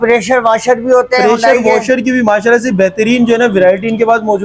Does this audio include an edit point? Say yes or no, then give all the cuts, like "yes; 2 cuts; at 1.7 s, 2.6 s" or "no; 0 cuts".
no; 0 cuts